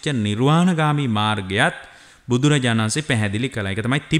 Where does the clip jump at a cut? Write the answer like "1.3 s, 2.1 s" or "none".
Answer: none